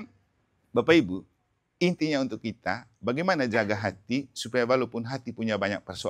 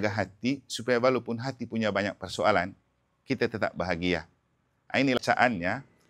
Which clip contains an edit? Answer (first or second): second